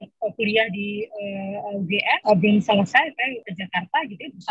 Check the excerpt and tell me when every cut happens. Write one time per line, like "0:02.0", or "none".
0:02.2
0:03.4